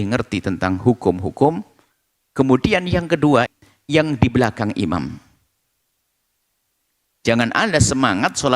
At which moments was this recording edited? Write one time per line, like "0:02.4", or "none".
0:03.5